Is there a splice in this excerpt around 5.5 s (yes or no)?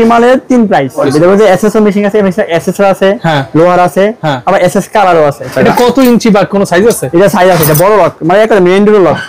yes